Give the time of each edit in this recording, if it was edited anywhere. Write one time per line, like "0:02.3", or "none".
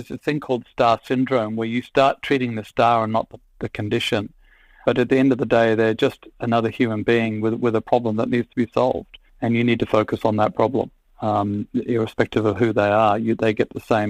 none